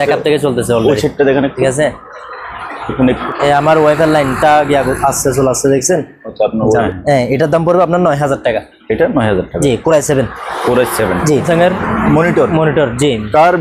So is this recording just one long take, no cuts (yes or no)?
no